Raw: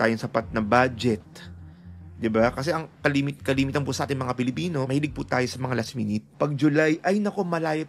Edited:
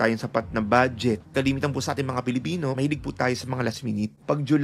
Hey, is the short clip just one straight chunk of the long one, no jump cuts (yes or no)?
no